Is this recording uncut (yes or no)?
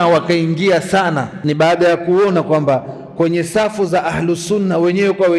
no